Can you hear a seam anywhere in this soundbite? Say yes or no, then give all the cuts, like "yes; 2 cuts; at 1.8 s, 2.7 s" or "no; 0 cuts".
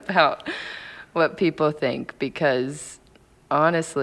no; 0 cuts